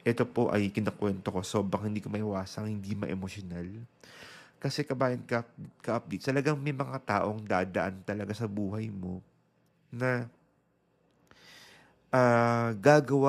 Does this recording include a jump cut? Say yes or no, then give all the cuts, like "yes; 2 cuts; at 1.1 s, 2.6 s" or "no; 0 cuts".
no; 0 cuts